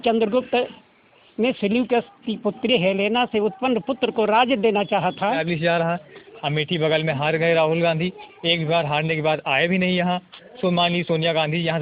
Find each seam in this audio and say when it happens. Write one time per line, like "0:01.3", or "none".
0:05.4